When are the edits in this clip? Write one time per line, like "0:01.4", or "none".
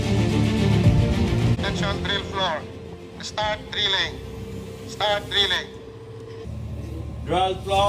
0:01.6